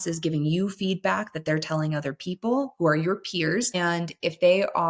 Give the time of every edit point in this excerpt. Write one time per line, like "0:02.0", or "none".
0:03.7